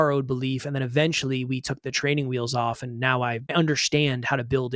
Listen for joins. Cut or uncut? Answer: cut